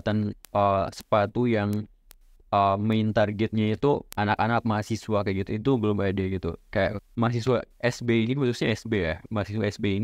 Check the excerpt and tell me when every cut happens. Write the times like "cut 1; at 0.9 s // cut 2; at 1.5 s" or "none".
cut 1; at 7.0 s